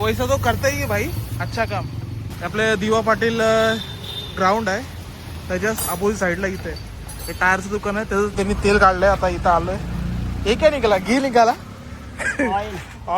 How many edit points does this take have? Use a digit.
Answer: 2